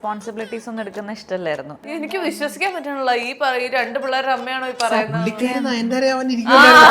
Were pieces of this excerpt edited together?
yes; 1 cut; at 1.9 s

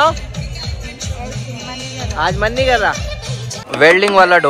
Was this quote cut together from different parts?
yes; 1 cut; at 3.6 s

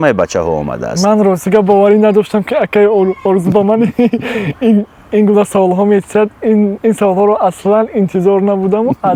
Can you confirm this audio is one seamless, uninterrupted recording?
yes; 0 cuts

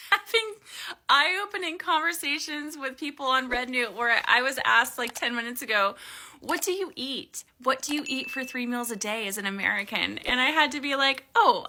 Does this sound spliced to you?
no; 0 cuts

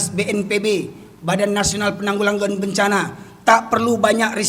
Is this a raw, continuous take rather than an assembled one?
yes; 0 cuts

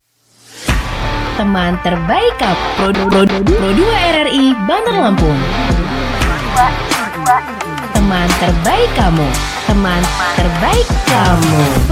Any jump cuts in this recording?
no; 0 cuts

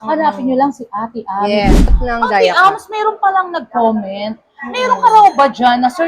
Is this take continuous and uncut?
no; 1 cut; at 2.0 s

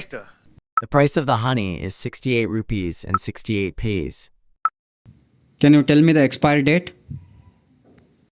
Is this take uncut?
yes; 0 cuts

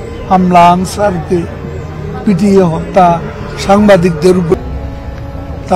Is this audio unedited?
no; 1 cut; at 4.6 s

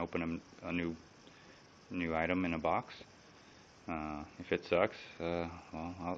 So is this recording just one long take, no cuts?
no; 1 cut; at 2.5 s

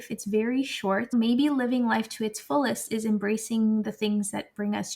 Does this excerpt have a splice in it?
yes; 1 cut; at 1.1 s

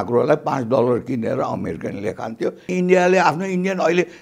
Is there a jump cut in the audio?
yes; 1 cut; at 2.7 s

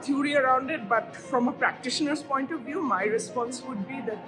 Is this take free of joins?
yes; 0 cuts

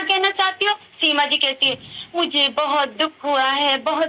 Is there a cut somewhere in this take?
no; 0 cuts

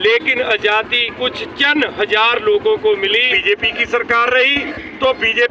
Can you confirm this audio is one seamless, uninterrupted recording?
no; 1 cut; at 3.3 s

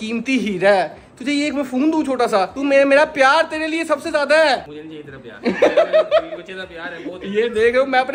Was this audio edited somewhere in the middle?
no; 0 cuts

